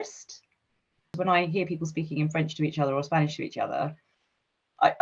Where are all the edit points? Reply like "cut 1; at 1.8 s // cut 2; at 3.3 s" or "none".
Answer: cut 1; at 1.2 s

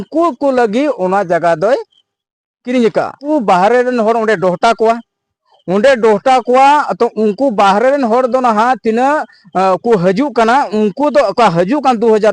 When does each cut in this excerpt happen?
cut 1; at 3.3 s

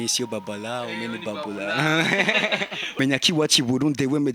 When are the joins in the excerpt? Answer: cut 1; at 3.0 s

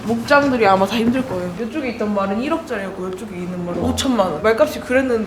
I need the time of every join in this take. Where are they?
cut 1; at 1.5 s // cut 2; at 4.4 s

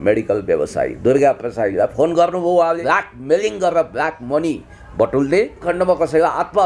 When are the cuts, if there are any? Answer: cut 1; at 2.8 s // cut 2; at 5.7 s

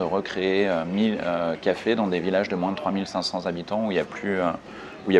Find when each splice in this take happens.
none

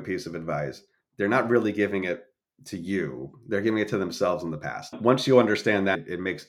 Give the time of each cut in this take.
cut 1; at 4.8 s

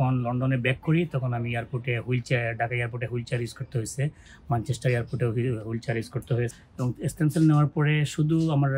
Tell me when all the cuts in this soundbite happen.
cut 1; at 6.5 s

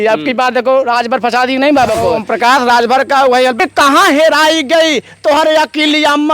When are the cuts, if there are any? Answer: cut 1; at 2.3 s // cut 2; at 3.6 s

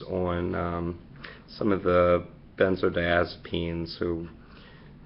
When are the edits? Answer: cut 1; at 4.0 s

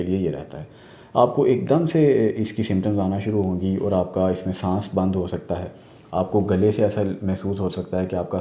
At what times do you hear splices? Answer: none

